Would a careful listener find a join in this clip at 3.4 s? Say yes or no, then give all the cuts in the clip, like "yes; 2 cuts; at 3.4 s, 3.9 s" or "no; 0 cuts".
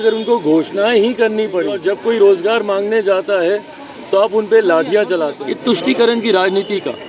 no; 2 cuts; at 1.8 s, 5.4 s